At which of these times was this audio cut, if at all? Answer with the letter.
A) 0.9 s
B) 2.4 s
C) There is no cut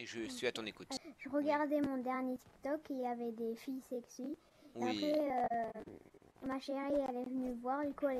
A